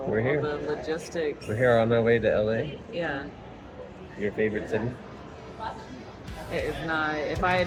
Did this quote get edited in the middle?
no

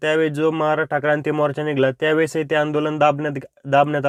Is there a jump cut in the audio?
no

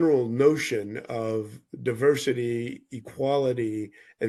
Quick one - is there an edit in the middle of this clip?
no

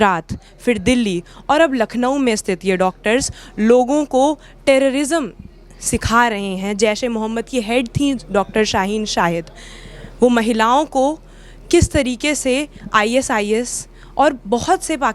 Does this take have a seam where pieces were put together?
no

